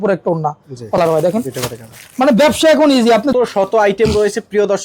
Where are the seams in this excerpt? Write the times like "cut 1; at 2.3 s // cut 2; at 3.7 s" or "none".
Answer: cut 1; at 1.0 s // cut 2; at 3.3 s

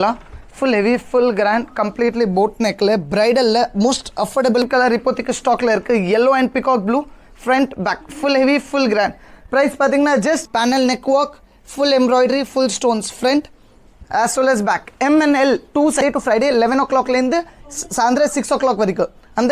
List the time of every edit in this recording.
cut 1; at 4.6 s // cut 2; at 10.5 s // cut 3; at 16.0 s

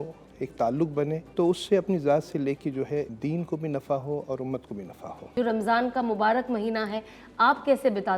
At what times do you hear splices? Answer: cut 1; at 1.2 s // cut 2; at 3.1 s // cut 3; at 5.2 s

